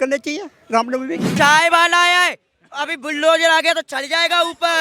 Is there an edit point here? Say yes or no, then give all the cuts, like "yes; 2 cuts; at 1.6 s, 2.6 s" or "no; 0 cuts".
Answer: yes; 1 cut; at 1.3 s